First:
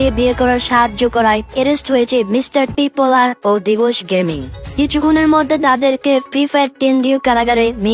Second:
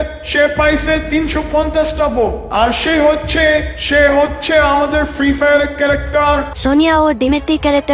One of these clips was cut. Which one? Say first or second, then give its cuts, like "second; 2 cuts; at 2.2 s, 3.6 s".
second; 1 cut; at 6.5 s